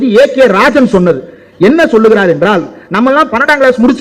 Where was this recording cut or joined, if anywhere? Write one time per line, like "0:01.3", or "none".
none